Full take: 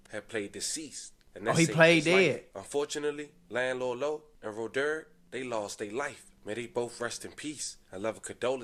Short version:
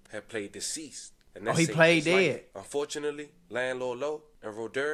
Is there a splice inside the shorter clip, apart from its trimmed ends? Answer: no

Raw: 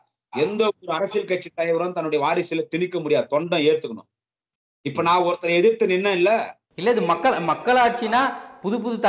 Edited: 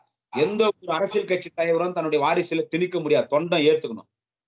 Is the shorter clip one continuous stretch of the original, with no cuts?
yes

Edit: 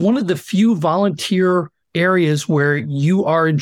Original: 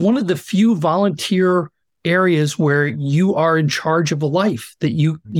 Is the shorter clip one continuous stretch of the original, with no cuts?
no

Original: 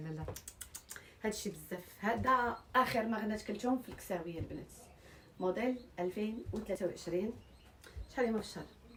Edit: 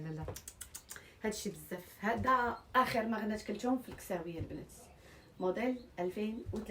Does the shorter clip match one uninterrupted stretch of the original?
yes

